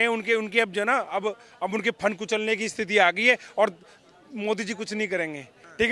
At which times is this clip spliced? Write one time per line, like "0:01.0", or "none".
none